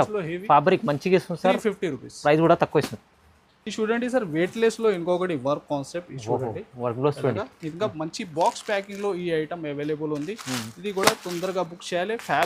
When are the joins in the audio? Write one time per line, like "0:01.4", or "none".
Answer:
none